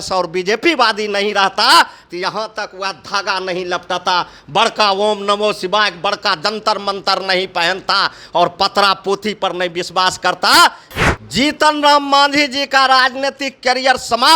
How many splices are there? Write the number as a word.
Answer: one